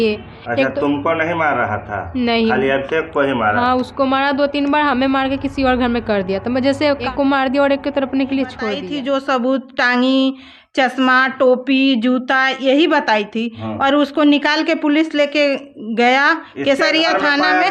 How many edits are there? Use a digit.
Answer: 2